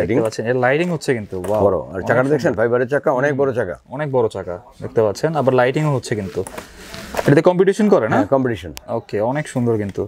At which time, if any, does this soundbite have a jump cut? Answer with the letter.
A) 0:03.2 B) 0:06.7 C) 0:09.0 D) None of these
D